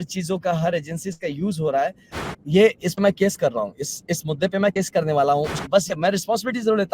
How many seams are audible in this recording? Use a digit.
2